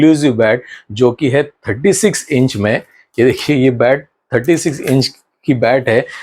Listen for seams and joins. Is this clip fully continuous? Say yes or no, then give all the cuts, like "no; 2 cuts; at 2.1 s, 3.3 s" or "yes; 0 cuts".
yes; 0 cuts